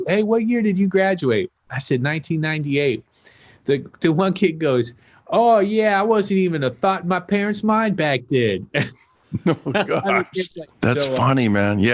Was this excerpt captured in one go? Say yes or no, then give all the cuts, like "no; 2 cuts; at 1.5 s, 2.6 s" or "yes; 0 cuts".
no; 1 cut; at 10.5 s